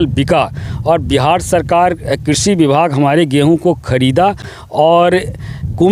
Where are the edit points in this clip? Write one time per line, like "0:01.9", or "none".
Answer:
none